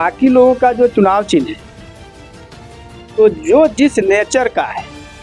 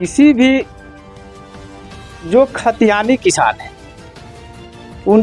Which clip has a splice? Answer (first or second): first